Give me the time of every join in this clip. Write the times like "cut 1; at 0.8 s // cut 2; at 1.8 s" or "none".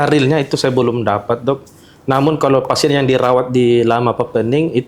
none